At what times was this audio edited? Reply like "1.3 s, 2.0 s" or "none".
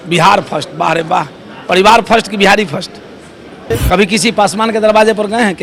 none